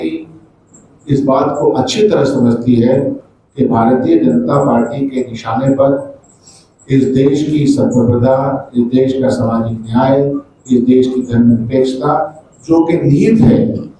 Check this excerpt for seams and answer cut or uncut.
uncut